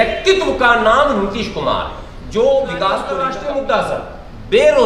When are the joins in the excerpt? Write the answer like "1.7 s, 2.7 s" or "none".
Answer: 3.2 s